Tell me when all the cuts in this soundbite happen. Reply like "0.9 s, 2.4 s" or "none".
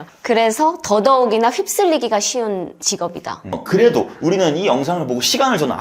3.6 s